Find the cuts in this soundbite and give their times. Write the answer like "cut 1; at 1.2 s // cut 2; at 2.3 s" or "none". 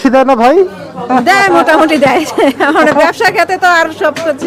none